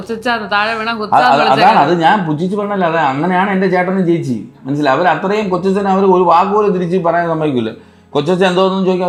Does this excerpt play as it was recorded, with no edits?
yes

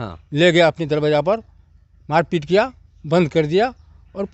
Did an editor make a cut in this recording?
no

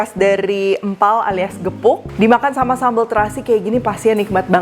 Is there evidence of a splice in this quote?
no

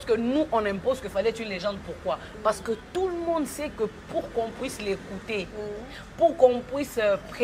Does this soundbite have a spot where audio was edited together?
no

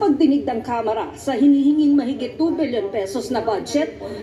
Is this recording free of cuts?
no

